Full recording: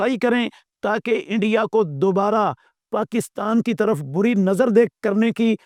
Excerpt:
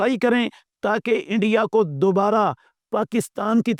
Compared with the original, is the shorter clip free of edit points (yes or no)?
yes